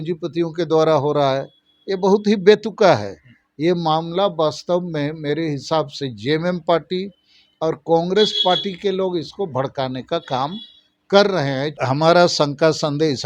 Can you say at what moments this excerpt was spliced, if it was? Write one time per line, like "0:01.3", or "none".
0:11.7